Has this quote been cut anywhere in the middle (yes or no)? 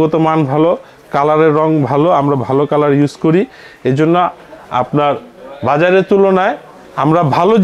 no